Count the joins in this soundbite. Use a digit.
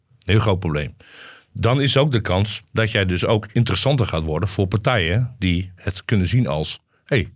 2